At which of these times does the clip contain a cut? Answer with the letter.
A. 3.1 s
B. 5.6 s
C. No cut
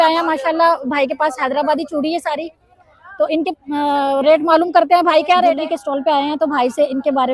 B